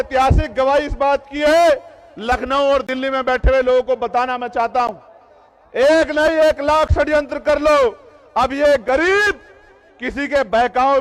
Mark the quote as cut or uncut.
uncut